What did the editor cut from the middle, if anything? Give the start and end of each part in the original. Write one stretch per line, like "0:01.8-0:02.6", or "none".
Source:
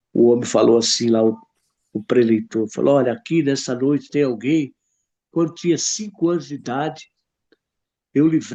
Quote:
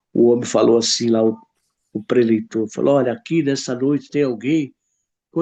none